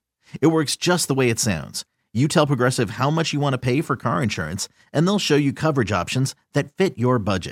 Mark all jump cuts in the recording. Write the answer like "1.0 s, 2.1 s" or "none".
none